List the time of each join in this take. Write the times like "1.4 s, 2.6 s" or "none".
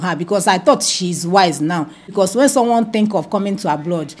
2.0 s